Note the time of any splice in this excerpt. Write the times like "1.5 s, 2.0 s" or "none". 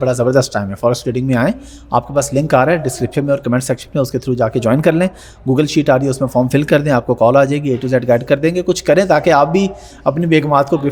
none